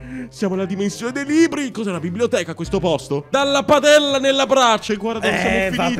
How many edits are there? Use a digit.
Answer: 1